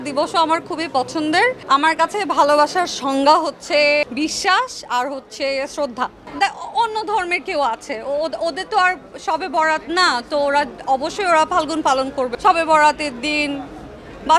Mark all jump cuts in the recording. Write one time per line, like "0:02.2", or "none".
0:01.6
0:04.0
0:06.2
0:12.3